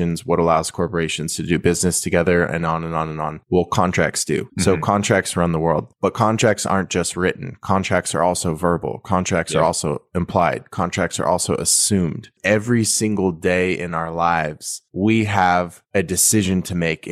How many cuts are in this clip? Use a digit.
1